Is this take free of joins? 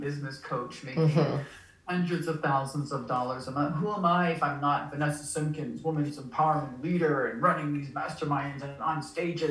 yes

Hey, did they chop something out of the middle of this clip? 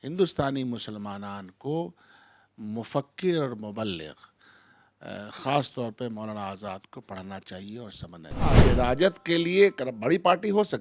yes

